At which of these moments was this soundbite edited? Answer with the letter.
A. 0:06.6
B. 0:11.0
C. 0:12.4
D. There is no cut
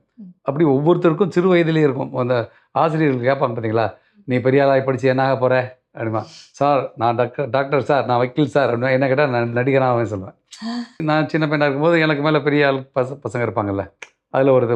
B